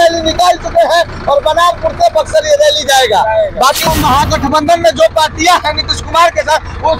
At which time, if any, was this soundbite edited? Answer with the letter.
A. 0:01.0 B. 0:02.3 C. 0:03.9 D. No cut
C